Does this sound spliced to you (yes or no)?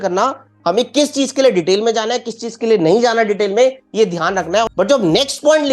yes